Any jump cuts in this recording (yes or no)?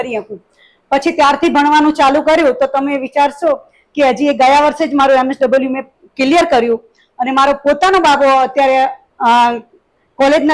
no